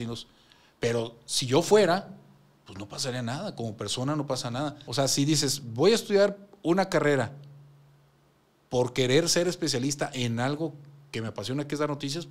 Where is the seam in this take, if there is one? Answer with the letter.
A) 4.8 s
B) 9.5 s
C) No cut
A